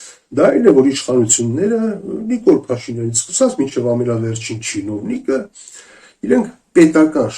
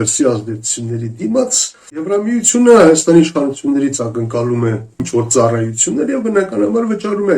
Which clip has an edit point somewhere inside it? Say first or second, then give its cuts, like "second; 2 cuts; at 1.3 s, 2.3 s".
second; 2 cuts; at 2.1 s, 5.0 s